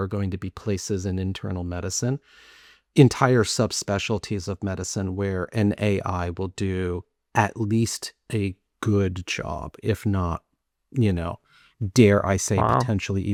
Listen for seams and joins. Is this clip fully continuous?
yes; 0 cuts

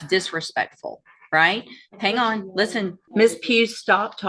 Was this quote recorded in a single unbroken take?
no; 1 cut; at 3.0 s

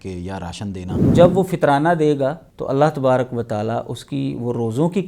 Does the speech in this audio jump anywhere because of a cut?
yes; 2 cuts; at 1.1 s, 2.5 s

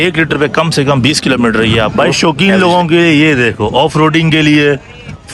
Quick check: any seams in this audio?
yes; 1 cut; at 1.9 s

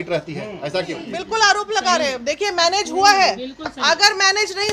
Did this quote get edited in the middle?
yes; 1 cut; at 1.1 s

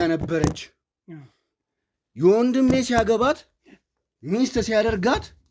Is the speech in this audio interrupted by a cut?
no; 0 cuts

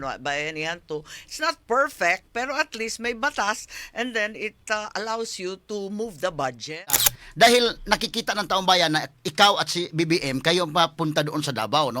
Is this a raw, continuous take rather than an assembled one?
no; 1 cut; at 7.0 s

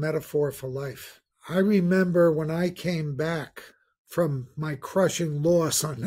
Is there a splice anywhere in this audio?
no; 0 cuts

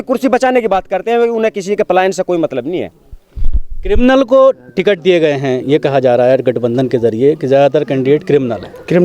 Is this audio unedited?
yes; 0 cuts

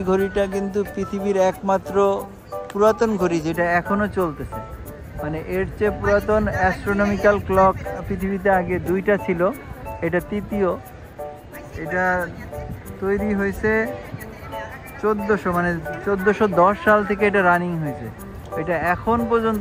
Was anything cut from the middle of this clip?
no; 0 cuts

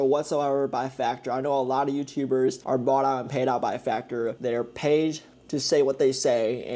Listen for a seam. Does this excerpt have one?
yes; 2 cuts; at 2.6 s, 4.4 s

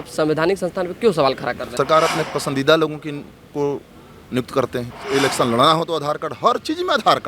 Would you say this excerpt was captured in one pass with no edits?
no; 2 cuts; at 1.7 s, 5.0 s

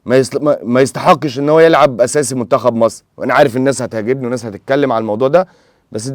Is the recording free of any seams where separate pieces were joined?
yes; 0 cuts

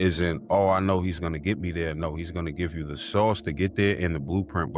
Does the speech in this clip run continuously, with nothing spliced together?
yes; 0 cuts

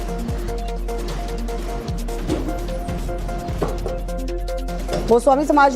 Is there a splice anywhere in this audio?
yes; 1 cut; at 3.0 s

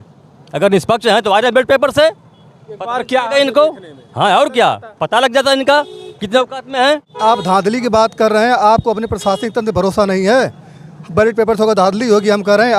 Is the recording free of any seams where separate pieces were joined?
no; 1 cut; at 7.1 s

